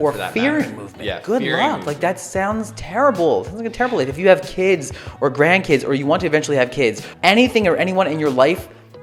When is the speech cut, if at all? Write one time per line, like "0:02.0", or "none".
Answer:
0:07.2